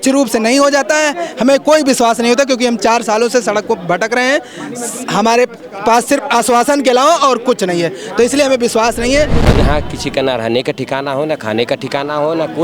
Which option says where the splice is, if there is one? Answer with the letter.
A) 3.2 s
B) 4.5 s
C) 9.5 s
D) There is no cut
C